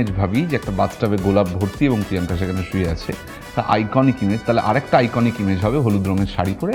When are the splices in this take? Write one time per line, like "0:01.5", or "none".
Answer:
none